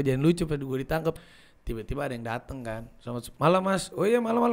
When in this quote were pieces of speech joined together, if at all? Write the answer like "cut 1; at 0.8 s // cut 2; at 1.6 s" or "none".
cut 1; at 1.2 s